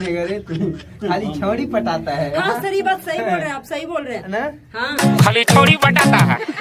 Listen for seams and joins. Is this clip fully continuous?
yes; 0 cuts

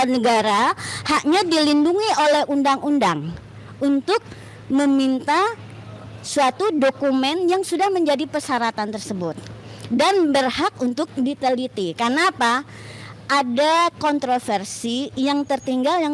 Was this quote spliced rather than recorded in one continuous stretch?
no; 0 cuts

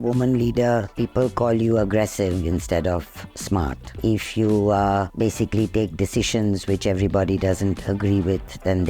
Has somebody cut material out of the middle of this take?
no; 0 cuts

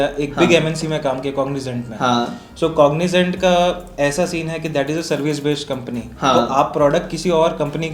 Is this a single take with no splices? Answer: yes; 0 cuts

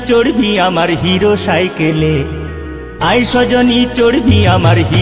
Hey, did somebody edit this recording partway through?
no; 0 cuts

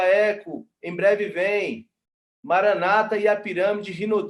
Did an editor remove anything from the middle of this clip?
no; 0 cuts

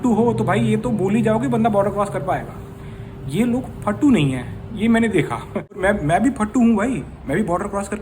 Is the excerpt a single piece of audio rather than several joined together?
no; 1 cut; at 5.6 s

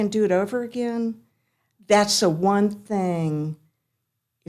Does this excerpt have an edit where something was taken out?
no; 0 cuts

